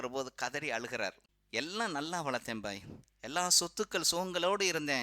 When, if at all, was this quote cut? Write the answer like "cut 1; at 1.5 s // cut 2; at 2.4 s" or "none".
cut 1; at 1.3 s